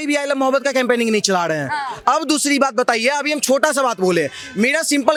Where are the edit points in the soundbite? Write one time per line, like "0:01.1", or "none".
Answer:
none